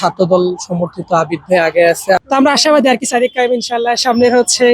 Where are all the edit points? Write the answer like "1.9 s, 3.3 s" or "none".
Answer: 2.2 s